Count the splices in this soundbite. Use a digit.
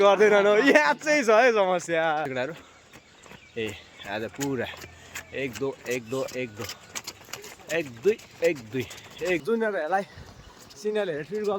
2